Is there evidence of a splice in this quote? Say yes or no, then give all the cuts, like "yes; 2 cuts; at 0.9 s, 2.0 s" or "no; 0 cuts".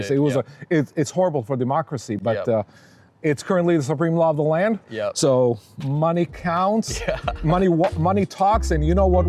no; 0 cuts